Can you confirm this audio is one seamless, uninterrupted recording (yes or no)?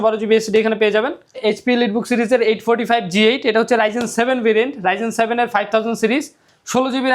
no